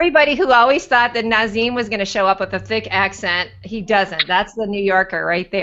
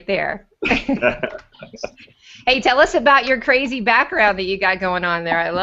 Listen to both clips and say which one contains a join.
second; 1 cut; at 1.9 s

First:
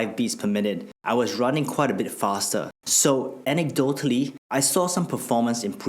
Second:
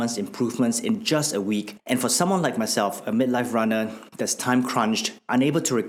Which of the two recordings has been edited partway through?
first; 3 cuts; at 0.9 s, 2.8 s, 4.4 s

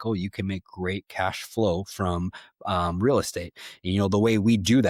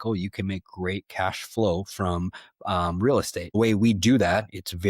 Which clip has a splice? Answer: second; 1 cut; at 3.5 s

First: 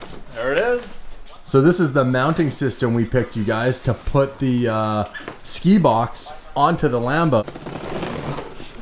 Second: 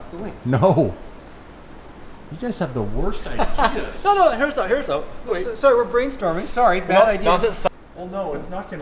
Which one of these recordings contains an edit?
first; 1 cut; at 7.4 s

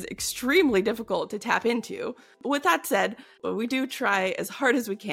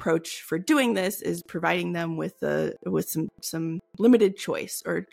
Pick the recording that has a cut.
first; 2 cuts; at 2.3 s, 3.4 s

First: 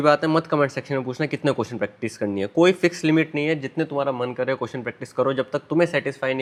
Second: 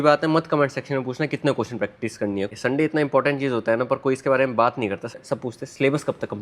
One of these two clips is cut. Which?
second; 2 cuts; at 2.5 s, 5.2 s

